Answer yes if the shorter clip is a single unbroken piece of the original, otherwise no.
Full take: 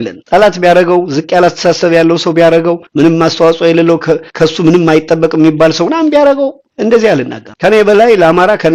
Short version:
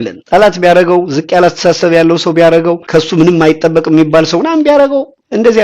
no